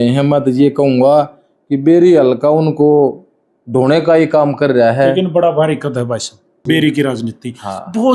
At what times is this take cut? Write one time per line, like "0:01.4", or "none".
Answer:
0:06.6